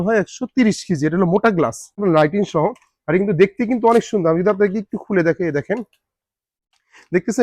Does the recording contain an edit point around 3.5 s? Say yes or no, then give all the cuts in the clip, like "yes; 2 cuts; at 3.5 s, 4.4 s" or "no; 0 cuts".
no; 1 cut; at 2.0 s